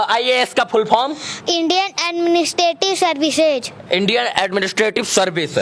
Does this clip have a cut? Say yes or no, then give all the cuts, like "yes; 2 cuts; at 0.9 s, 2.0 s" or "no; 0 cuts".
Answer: no; 0 cuts